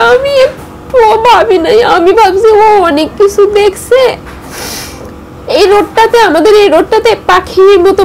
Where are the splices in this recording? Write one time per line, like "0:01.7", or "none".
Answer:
none